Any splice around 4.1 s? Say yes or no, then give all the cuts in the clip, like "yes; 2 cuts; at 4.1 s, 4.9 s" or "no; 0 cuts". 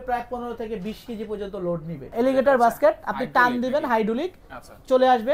no; 1 cut; at 2.1 s